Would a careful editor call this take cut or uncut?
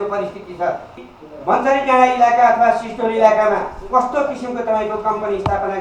cut